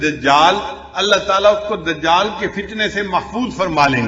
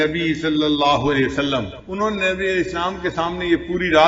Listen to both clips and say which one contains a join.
second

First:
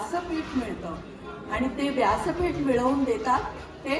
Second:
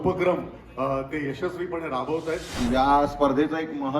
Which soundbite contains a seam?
second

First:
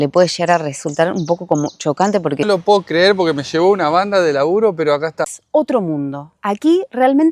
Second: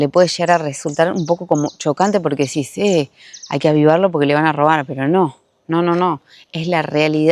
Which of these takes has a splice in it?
first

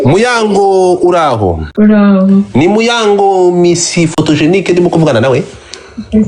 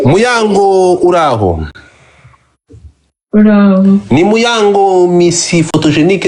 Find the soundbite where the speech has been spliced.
first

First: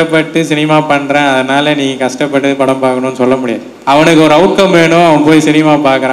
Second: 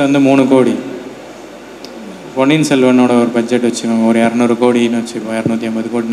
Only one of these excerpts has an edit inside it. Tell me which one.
first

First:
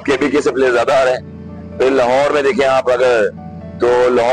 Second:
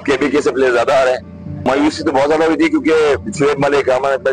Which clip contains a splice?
second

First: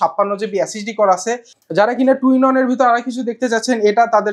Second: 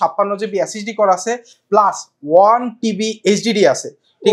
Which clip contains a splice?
first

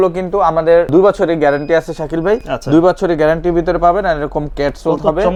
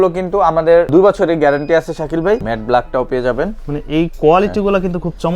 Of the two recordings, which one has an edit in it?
second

